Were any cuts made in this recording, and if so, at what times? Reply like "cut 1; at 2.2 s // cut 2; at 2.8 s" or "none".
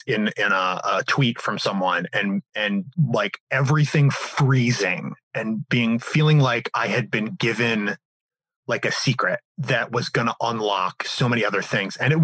cut 1; at 2.9 s // cut 2; at 9.5 s